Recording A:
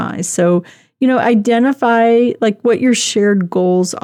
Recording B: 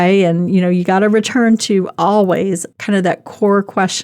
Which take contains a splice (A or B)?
B